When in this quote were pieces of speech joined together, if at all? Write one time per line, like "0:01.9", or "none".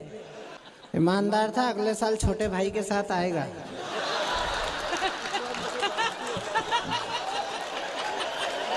0:01.0